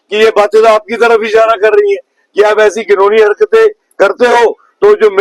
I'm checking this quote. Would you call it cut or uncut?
uncut